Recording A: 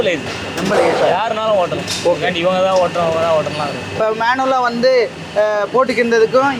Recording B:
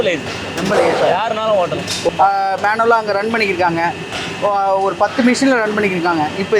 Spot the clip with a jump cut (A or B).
B